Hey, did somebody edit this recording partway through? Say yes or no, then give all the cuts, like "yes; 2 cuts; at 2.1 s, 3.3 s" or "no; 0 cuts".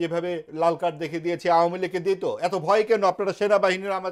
no; 0 cuts